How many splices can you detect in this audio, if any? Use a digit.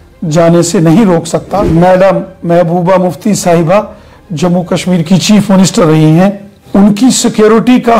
2